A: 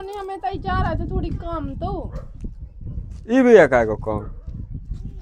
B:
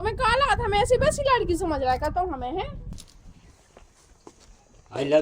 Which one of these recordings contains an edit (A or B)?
B